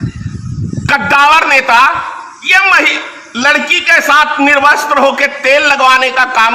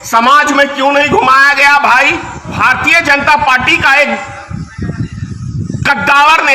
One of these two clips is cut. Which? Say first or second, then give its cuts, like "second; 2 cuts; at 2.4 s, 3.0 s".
second; 1 cut; at 2.5 s